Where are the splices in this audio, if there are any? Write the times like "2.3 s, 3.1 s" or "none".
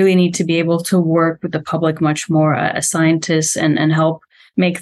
none